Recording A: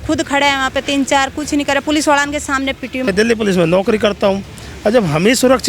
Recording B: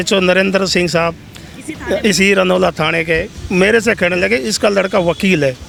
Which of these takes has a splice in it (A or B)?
A